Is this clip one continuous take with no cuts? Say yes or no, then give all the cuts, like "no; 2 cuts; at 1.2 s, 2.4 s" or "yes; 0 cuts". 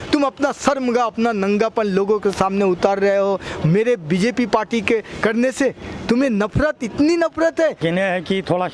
no; 1 cut; at 7.8 s